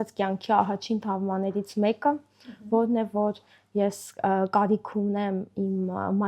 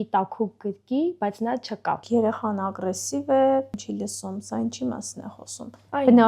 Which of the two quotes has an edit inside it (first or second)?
second